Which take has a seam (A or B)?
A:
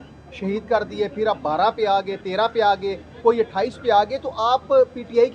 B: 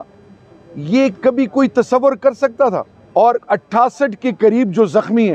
B